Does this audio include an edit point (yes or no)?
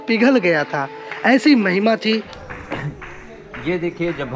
yes